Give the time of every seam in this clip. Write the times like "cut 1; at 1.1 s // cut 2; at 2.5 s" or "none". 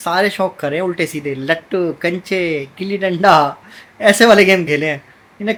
none

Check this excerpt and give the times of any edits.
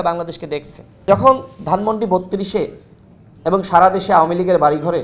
cut 1; at 1.0 s

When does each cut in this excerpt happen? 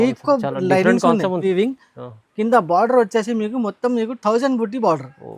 cut 1; at 1.4 s

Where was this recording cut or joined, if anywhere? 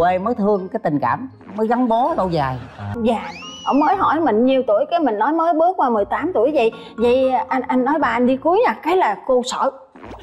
cut 1; at 2.9 s

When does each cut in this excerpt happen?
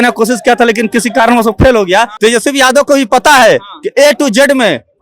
cut 1; at 2.1 s

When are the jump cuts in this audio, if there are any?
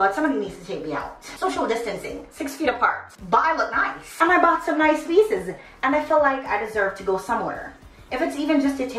cut 1; at 1.2 s // cut 2; at 3.1 s // cut 3; at 4.0 s

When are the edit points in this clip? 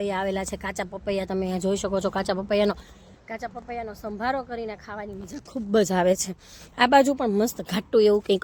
none

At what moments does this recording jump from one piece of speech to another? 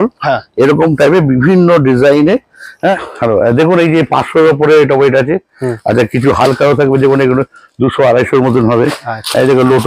cut 1; at 2.7 s

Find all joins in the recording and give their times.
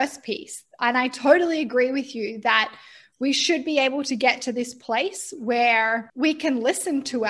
cut 1; at 6.1 s

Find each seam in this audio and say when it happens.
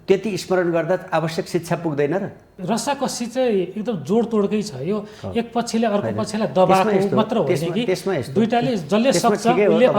cut 1; at 2.5 s

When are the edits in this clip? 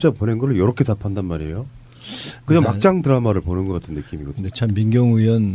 none

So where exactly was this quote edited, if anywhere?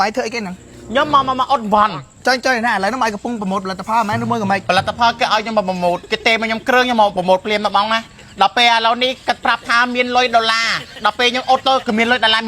cut 1; at 1.9 s // cut 2; at 4.6 s

